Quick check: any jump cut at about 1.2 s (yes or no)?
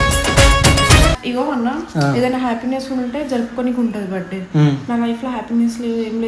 yes